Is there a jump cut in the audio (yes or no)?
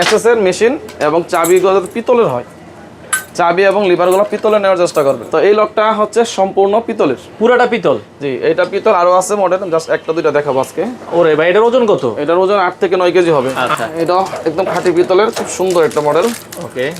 yes